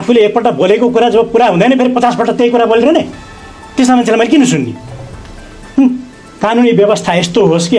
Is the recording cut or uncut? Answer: cut